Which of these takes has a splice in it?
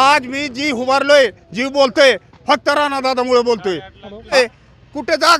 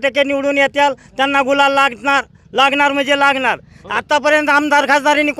first; 1 cut; at 4.3 s

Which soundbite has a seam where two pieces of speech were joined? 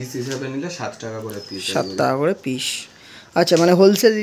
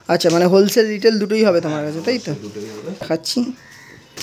second; 1 cut; at 3.1 s

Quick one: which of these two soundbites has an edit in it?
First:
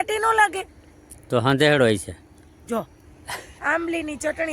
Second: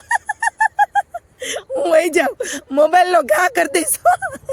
first; 1 cut; at 3.4 s

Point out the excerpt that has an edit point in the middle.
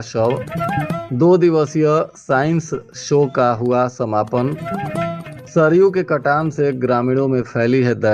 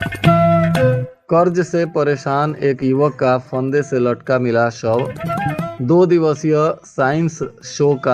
second; 1 cut; at 1.1 s

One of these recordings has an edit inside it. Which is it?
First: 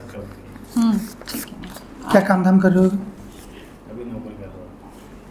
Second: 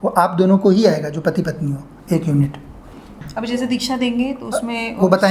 second; 1 cut; at 3.2 s

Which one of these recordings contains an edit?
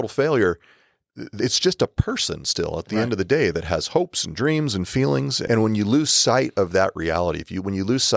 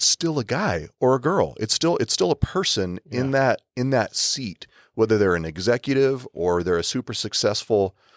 first; 1 cut; at 5.4 s

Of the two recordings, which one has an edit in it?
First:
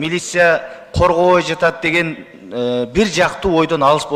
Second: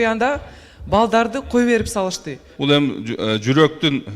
second; 1 cut; at 2.4 s

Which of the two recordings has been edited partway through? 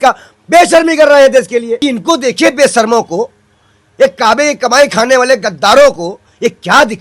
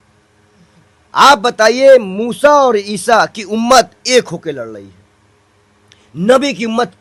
first; 1 cut; at 1.8 s

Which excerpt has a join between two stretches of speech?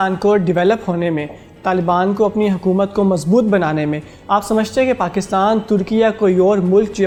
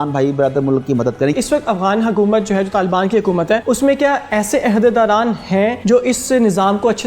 second; 3 cuts; at 1.3 s, 3.6 s, 5.8 s

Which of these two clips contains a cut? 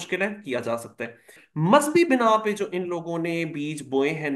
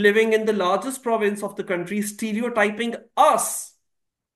first; 1 cut; at 1.4 s

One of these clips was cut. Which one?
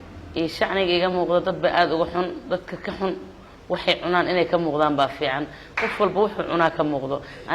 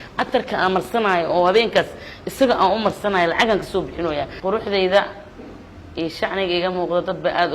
second; 1 cut; at 4.4 s

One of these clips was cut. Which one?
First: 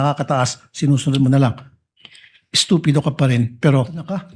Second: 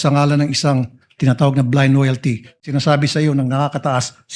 second; 1 cut; at 2.6 s

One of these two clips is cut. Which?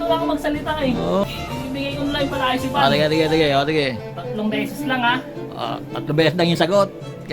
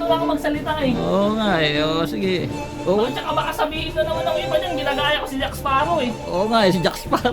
first; 1 cut; at 1.2 s

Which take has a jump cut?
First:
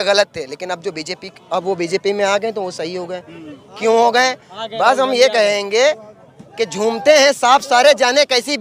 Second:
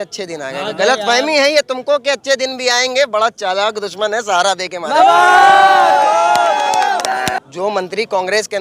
second; 1 cut; at 7.4 s

